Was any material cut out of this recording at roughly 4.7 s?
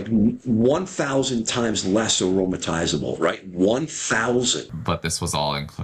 yes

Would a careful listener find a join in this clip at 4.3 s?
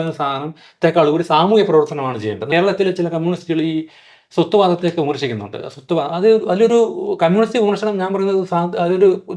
no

